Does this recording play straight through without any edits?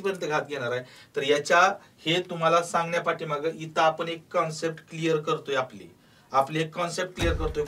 yes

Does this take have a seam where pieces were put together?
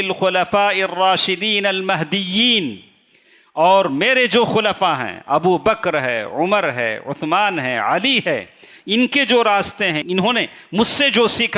yes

